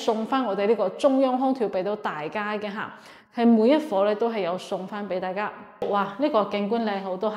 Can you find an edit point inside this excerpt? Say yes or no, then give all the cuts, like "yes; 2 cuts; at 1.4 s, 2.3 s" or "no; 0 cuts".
yes; 1 cut; at 5.8 s